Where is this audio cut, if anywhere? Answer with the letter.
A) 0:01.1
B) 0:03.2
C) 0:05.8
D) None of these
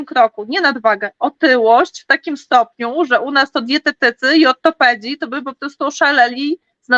D